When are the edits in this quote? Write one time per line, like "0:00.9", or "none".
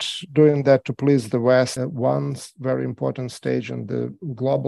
0:01.8